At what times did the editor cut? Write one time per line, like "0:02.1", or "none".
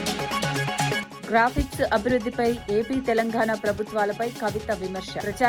0:01.1